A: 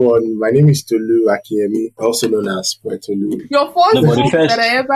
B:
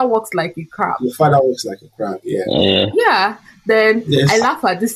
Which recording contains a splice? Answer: A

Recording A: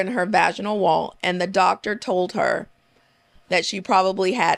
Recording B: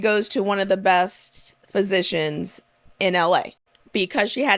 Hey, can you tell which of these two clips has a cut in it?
B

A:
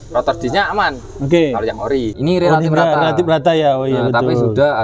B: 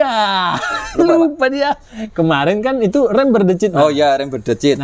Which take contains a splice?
A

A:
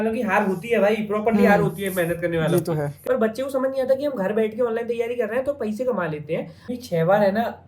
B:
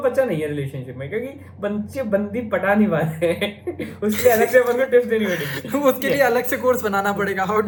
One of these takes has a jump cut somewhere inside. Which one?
A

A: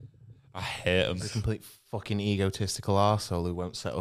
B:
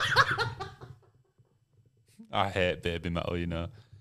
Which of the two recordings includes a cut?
A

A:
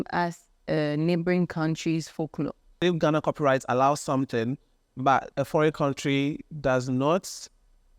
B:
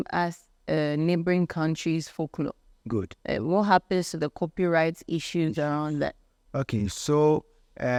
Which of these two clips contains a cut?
A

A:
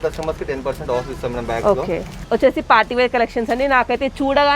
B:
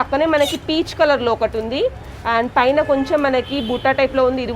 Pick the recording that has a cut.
A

